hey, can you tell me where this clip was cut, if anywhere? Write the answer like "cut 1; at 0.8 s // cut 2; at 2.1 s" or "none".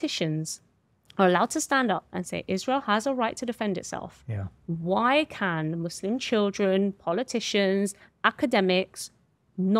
none